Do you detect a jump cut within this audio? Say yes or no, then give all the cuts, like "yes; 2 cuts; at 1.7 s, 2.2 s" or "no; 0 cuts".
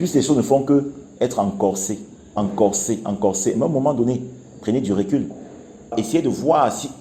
yes; 1 cut; at 5.9 s